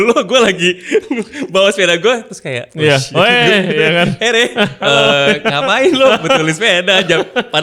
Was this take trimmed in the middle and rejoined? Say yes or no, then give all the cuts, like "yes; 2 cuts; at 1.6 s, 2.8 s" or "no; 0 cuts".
no; 0 cuts